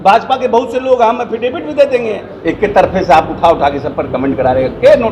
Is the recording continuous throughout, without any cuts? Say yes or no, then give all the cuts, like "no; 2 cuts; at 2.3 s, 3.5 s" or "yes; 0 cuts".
no; 1 cut; at 2.3 s